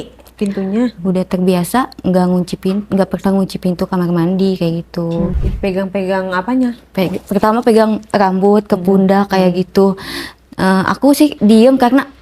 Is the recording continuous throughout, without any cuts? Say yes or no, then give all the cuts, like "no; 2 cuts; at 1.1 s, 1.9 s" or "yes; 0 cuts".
no; 3 cuts; at 0.9 s, 5.4 s, 11.3 s